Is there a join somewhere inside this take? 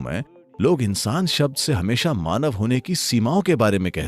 no; 0 cuts

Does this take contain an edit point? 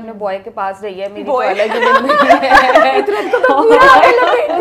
no; 0 cuts

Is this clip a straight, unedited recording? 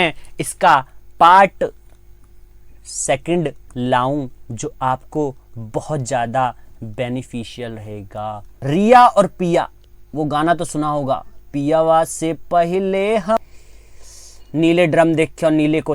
no; 2 cuts; at 8.5 s, 13.4 s

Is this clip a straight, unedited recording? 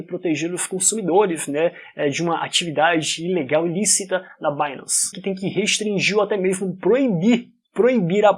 yes; 0 cuts

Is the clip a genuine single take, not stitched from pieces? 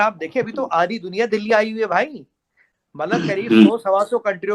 yes; 0 cuts

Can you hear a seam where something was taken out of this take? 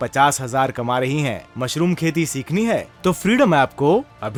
no; 0 cuts

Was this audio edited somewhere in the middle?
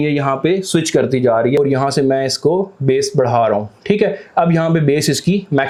no; 0 cuts

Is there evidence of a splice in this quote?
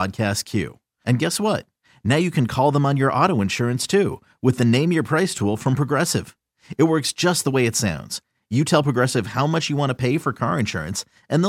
no; 0 cuts

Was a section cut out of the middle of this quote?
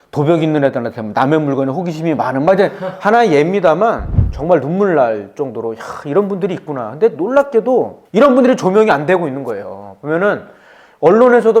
yes; 1 cut; at 4.1 s

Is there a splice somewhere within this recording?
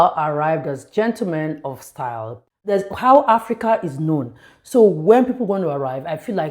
yes; 1 cut; at 2.7 s

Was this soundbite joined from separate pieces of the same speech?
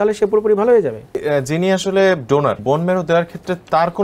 yes; 2 cuts; at 1.2 s, 2.6 s

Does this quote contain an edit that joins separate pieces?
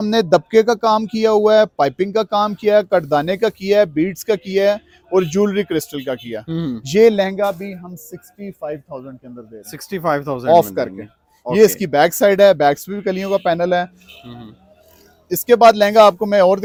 no; 0 cuts

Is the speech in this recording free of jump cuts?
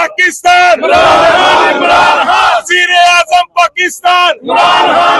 yes; 0 cuts

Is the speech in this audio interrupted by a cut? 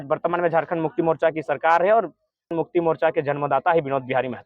yes; 1 cut; at 2.5 s

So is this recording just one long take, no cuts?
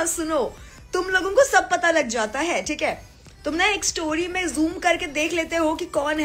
yes; 0 cuts

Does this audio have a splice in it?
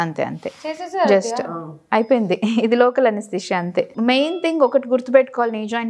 yes; 1 cut; at 3.9 s

